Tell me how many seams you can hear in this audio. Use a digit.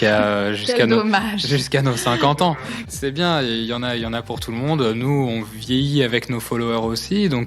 1